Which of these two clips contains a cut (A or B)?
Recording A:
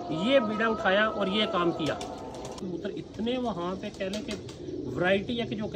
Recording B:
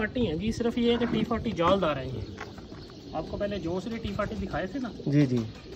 A